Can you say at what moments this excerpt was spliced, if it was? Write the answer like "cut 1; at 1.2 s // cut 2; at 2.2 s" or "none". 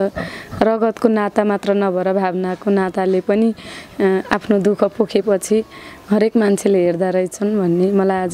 none